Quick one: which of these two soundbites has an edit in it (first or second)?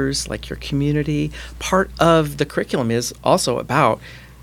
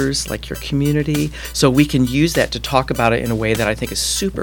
second